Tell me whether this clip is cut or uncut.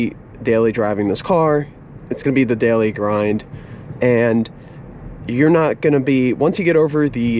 uncut